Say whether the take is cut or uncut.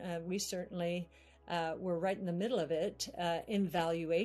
uncut